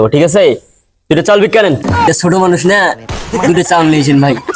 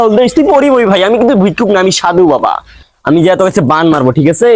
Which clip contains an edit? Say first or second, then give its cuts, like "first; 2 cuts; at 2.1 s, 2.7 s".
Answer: first; 1 cut; at 2.1 s